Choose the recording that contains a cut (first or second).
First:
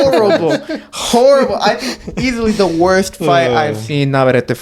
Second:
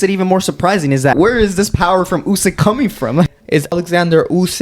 second